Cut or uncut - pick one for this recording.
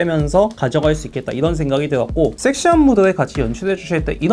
cut